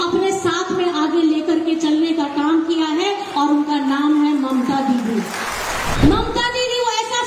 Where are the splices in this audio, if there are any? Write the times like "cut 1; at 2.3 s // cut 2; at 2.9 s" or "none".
cut 1; at 5.9 s